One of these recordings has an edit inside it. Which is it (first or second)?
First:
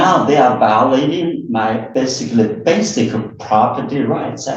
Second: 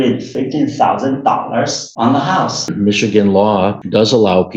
second